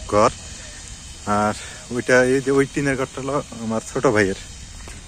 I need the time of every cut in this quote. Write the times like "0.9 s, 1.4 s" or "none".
none